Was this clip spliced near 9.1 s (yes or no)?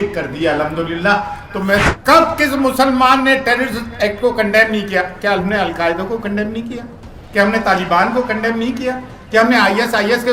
no